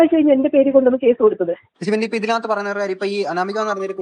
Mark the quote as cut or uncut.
cut